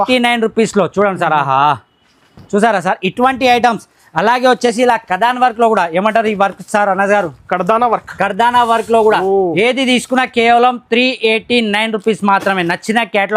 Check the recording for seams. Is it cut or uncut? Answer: uncut